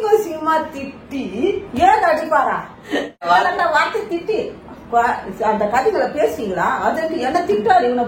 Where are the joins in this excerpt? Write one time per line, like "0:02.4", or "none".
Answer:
0:03.3